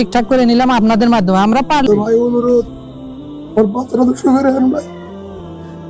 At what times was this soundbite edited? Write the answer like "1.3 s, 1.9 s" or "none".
1.8 s

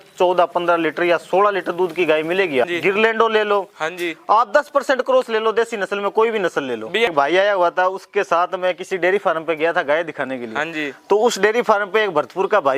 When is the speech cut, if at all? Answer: 2.6 s, 7.1 s

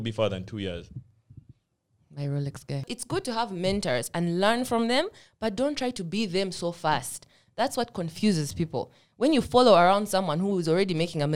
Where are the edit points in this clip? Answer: 2.9 s

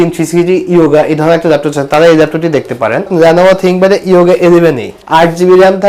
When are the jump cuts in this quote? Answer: 3.1 s, 4.9 s

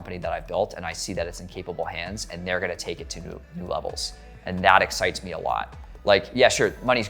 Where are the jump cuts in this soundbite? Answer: none

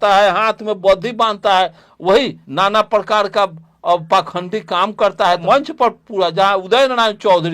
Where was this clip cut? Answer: 2.4 s, 5.4 s

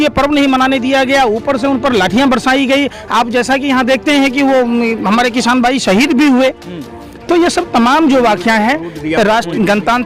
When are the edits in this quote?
none

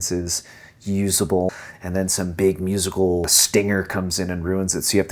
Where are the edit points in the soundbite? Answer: 1.7 s, 3.4 s

